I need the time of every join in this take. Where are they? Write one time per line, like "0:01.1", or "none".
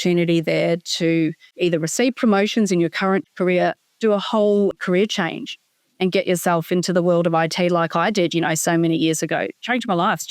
0:01.5
0:03.2
0:04.7